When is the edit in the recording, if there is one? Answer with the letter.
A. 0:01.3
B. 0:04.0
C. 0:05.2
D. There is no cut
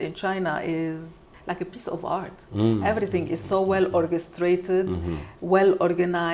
A